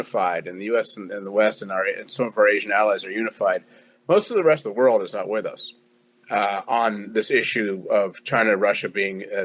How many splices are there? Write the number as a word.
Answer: one